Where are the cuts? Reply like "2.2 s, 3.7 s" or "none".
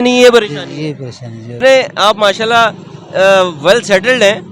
1.6 s